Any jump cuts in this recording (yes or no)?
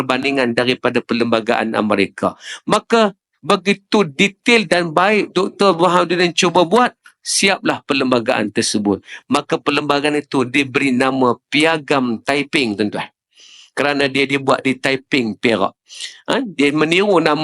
no